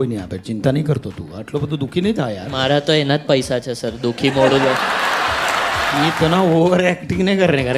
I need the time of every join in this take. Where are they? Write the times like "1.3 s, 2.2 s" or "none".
2.5 s, 6.1 s